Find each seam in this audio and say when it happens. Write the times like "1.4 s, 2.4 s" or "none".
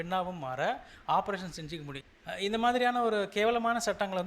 1.9 s